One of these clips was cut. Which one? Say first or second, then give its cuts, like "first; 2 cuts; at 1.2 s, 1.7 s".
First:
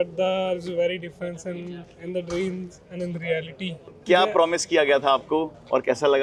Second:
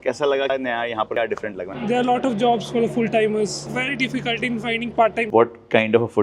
second; 3 cuts; at 1.7 s, 3.7 s, 5.2 s